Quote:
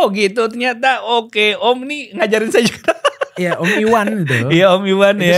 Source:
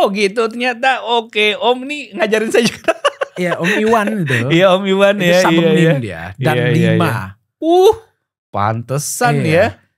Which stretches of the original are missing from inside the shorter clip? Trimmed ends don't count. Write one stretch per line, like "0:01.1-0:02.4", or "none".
none